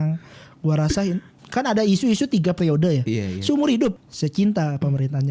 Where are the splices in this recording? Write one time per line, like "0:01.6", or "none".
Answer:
0:04.0